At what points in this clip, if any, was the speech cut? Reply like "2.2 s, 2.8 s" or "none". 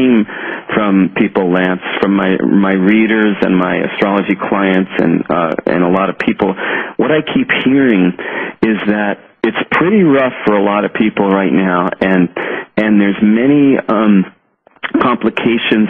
9.8 s